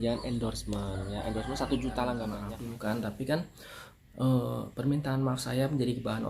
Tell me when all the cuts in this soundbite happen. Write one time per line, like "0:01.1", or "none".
0:02.4